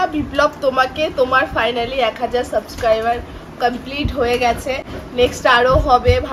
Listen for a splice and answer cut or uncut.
uncut